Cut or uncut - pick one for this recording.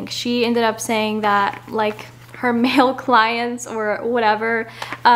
uncut